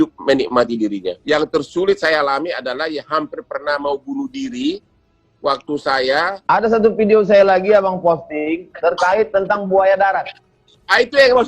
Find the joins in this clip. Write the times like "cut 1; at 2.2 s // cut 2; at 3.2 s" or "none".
cut 1; at 1.2 s // cut 2; at 6.3 s